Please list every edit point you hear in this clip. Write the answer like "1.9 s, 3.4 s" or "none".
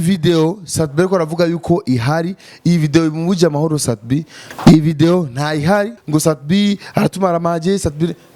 4.4 s, 6.0 s